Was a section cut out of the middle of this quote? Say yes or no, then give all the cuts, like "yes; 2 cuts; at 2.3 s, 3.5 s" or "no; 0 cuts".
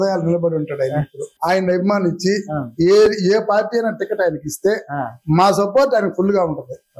yes; 1 cut; at 1.3 s